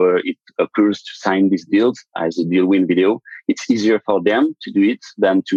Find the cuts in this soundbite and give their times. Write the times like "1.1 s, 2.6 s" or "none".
none